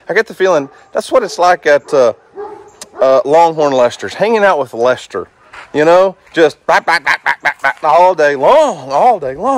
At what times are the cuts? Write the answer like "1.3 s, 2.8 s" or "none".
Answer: none